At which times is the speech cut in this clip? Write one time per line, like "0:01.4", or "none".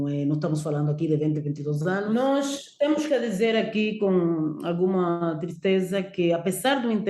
0:02.1